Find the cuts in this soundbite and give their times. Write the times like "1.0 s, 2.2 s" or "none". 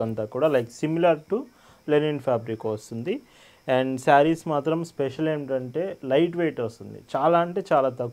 none